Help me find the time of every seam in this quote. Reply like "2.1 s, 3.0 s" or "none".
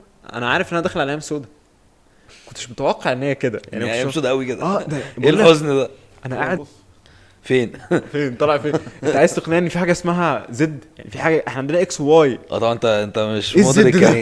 6.7 s

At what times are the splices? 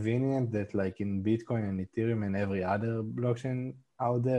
none

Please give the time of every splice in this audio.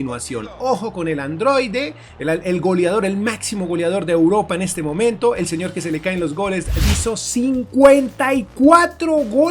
6.8 s

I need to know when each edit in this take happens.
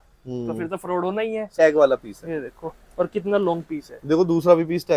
1.5 s

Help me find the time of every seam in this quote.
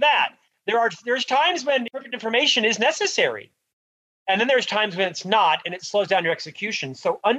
1.9 s

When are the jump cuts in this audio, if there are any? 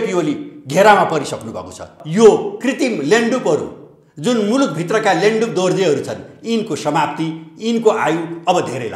2.0 s

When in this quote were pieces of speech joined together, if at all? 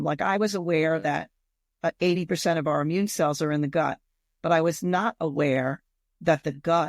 none

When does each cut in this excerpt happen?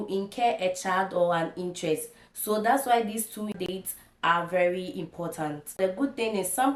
none

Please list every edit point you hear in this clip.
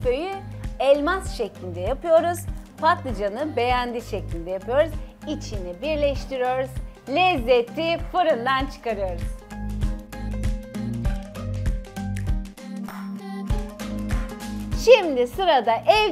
12.6 s, 14.8 s

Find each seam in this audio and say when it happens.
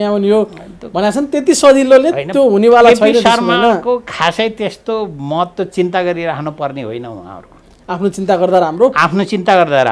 none

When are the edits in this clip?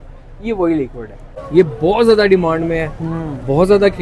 1.3 s

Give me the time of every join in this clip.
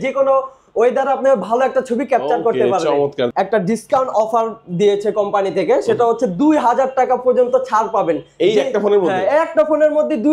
3.3 s

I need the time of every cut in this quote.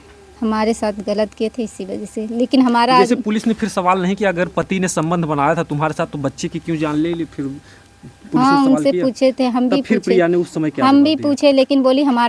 none

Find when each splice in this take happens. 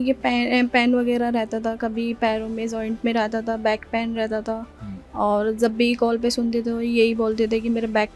none

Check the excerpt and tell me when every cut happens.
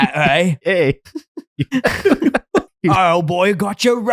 2.7 s

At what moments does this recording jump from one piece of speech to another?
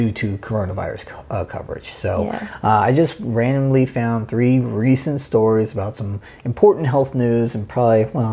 none

